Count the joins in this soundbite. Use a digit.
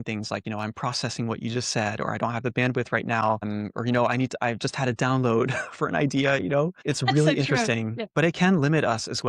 2